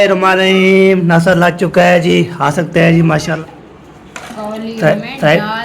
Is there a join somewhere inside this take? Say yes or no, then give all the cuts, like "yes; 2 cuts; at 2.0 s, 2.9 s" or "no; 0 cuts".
yes; 1 cut; at 3.3 s